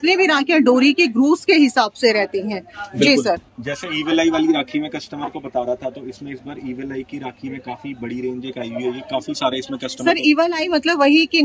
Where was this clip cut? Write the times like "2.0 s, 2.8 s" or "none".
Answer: none